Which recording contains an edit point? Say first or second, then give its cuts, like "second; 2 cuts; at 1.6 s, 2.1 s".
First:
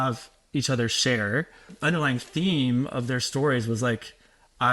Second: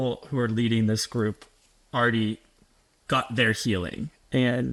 first; 1 cut; at 1.7 s